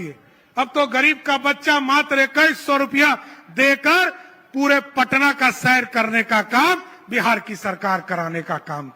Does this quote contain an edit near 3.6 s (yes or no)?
no